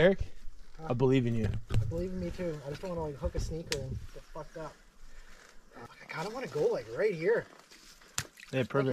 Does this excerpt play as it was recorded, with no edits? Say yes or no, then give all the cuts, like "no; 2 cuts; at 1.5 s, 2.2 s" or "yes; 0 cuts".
no; 1 cut; at 5.9 s